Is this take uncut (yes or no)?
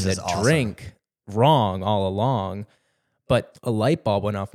no